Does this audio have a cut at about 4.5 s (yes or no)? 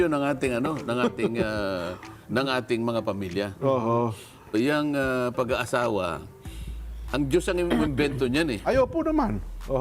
yes